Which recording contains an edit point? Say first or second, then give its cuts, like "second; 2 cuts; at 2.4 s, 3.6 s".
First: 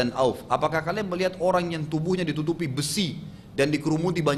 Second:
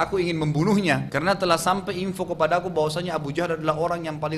second; 1 cut; at 1.1 s